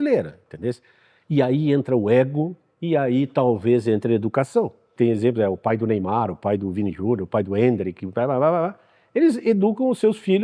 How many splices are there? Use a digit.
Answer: 1